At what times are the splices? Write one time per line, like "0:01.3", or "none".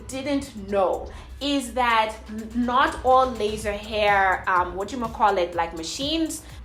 none